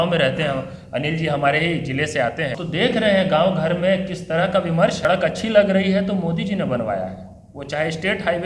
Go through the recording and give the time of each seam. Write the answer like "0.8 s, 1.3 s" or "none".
2.6 s, 5.0 s